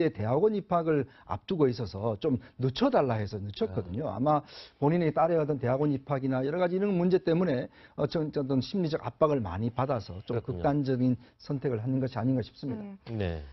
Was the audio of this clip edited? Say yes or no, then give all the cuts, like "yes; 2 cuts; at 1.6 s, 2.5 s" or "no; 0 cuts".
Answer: yes; 1 cut; at 3.8 s